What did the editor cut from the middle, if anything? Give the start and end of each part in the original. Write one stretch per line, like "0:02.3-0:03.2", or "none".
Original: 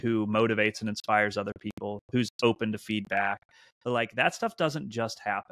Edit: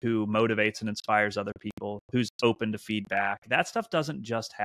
0:03.4-0:04.1